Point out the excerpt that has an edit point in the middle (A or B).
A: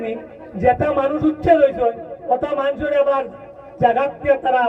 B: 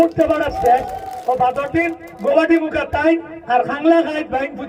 B